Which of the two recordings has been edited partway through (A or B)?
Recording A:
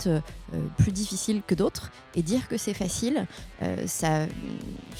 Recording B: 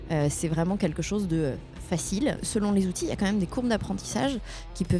B